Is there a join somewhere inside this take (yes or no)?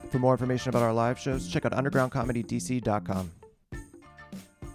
yes